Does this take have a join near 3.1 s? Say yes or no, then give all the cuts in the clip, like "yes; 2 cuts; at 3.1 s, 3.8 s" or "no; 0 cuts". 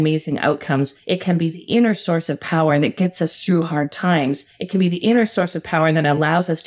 no; 2 cuts; at 1.0 s, 4.5 s